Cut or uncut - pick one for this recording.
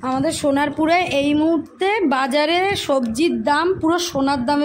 uncut